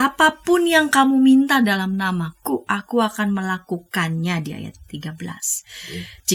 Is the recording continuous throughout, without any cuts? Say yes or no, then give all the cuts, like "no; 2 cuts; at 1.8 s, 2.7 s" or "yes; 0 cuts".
yes; 0 cuts